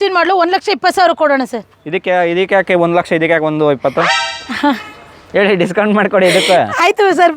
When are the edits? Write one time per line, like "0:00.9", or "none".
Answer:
none